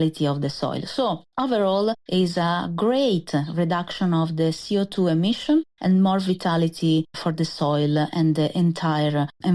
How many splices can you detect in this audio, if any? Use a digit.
3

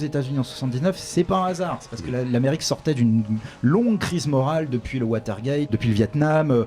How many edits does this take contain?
1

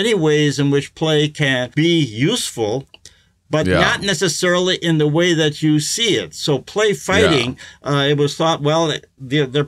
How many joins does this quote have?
1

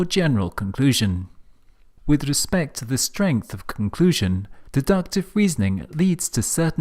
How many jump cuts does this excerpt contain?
1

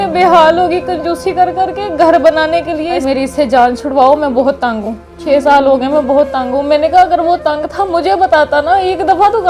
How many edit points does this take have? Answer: 1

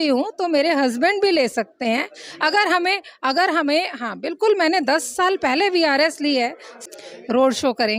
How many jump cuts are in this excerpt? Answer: 1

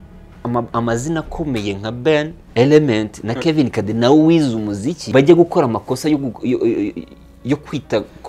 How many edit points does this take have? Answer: 2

